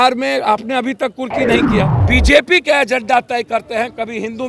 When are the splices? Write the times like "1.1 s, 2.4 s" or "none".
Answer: 2.0 s